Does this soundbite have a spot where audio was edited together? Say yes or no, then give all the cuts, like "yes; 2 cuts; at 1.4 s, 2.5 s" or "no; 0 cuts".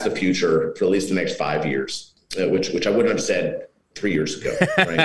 no; 0 cuts